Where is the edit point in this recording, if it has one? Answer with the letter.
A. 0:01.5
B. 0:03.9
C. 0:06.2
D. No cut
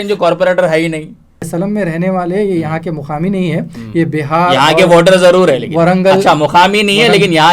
A